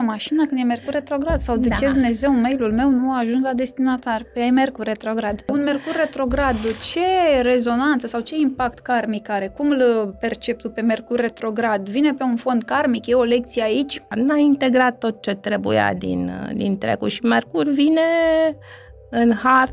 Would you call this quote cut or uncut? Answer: cut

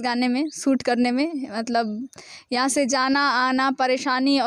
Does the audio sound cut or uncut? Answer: uncut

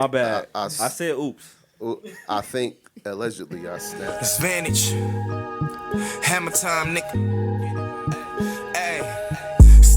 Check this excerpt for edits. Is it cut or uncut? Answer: cut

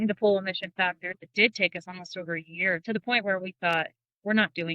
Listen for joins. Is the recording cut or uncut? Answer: cut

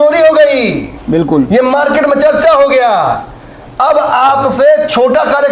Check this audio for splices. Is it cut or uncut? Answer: uncut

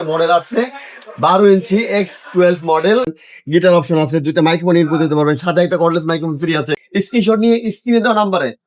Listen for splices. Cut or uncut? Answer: cut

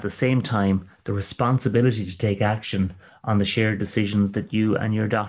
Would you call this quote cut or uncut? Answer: uncut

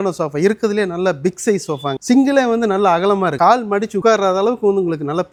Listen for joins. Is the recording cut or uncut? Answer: uncut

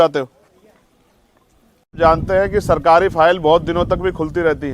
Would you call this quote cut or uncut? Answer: cut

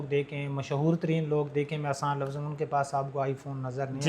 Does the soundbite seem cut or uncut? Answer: uncut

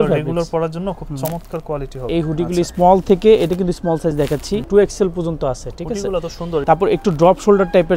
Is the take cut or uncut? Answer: cut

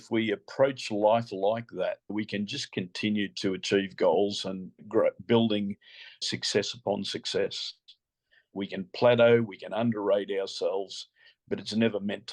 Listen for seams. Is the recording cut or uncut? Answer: cut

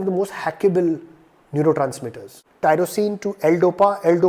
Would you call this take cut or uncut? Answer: cut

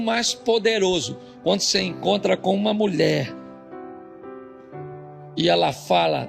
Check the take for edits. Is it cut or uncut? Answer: uncut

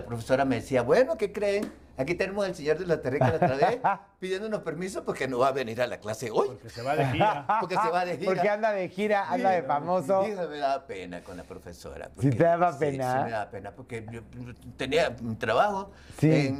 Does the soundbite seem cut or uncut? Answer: uncut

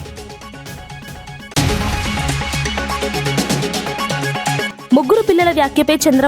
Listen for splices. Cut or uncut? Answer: cut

